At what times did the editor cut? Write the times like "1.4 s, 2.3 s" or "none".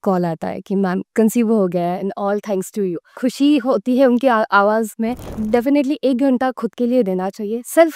5.3 s